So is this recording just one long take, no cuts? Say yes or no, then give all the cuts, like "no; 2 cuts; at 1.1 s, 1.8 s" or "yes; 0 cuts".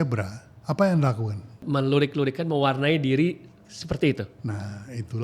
no; 2 cuts; at 1.6 s, 4.3 s